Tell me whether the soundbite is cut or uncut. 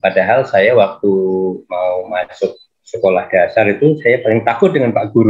uncut